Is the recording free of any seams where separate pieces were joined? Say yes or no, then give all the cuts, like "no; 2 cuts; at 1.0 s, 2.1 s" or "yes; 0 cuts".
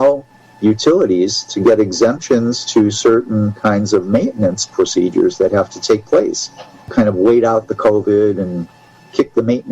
no; 1 cut; at 6.9 s